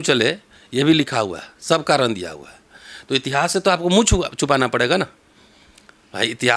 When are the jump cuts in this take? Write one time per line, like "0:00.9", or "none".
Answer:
none